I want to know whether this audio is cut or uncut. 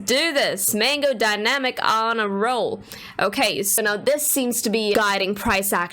cut